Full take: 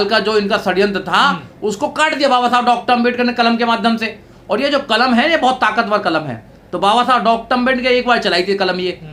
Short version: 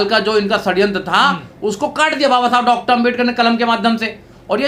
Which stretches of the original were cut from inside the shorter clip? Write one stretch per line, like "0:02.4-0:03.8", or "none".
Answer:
none